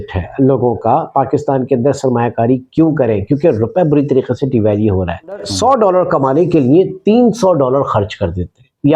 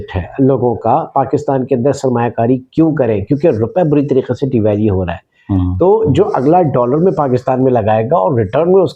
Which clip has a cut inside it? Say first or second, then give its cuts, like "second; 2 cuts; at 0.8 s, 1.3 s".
first; 1 cut; at 5.5 s